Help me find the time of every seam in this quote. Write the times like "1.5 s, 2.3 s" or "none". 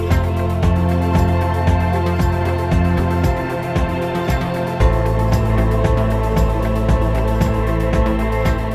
none